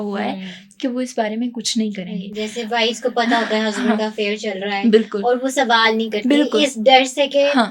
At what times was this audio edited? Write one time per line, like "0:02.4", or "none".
none